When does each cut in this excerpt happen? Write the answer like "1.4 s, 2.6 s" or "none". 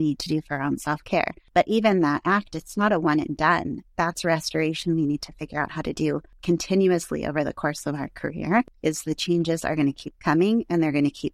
1.4 s, 6.3 s, 8.7 s